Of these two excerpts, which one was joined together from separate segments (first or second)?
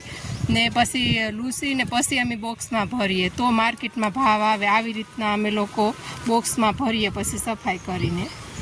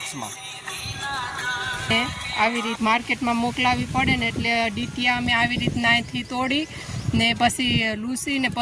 second